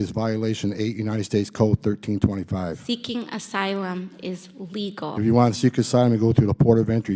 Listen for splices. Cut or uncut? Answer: uncut